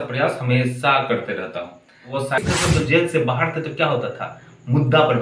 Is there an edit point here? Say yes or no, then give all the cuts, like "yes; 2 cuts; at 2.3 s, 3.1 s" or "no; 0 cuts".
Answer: yes; 1 cut; at 2.4 s